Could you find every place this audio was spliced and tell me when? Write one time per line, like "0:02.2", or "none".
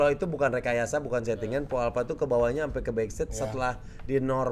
none